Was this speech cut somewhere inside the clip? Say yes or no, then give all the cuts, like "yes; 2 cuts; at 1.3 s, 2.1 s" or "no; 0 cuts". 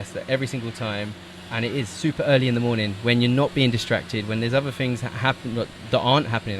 no; 0 cuts